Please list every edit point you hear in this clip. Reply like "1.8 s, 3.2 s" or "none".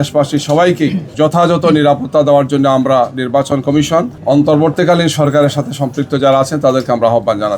1.0 s, 4.1 s